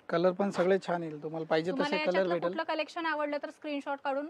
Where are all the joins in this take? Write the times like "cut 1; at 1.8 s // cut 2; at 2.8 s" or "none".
none